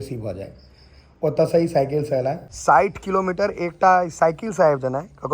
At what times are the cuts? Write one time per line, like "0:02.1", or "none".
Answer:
0:02.5